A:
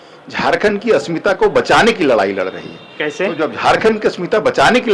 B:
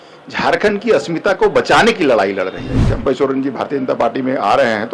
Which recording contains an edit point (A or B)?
B